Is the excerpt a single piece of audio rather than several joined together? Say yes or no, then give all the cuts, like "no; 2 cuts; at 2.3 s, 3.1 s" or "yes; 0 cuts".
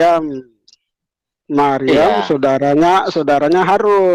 yes; 0 cuts